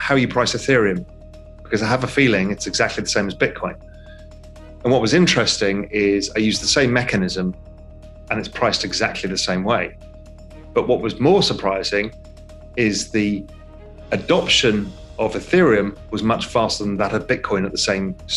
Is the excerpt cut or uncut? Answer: uncut